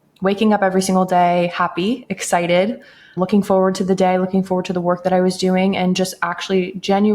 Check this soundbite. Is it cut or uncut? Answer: cut